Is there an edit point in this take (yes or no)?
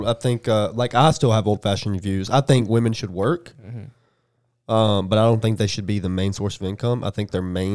no